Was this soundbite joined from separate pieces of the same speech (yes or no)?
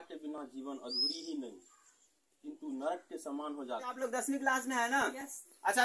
yes